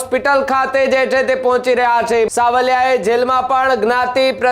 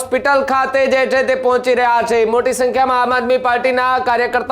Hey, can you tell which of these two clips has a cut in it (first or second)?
first